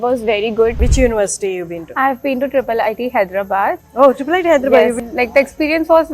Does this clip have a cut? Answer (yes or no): yes